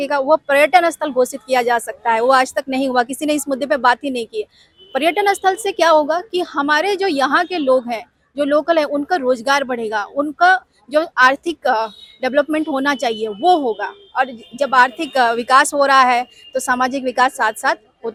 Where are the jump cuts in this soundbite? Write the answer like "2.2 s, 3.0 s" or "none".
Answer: none